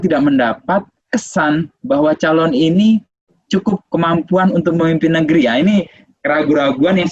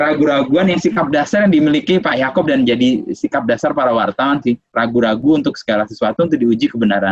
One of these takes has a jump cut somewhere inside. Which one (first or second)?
first